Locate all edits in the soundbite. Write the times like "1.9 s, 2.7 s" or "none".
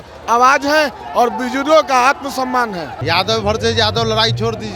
none